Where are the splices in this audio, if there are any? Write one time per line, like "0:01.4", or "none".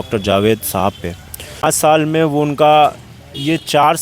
0:01.6